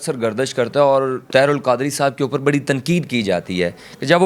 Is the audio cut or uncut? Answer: uncut